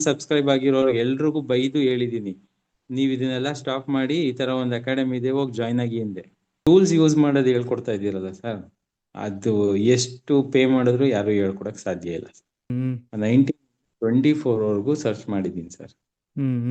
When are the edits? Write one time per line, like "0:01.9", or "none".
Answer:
0:06.6
0:12.7